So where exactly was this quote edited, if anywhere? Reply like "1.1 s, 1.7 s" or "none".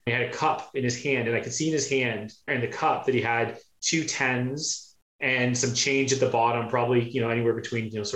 none